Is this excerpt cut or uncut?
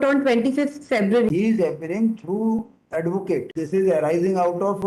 cut